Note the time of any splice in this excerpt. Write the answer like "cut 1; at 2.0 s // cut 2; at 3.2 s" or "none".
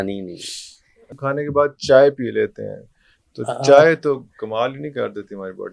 cut 1; at 1.2 s